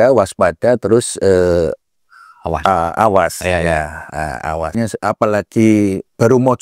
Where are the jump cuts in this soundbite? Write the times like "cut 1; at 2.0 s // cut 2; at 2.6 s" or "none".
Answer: cut 1; at 4.8 s